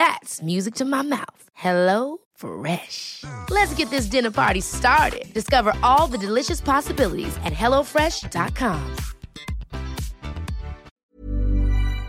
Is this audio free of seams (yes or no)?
no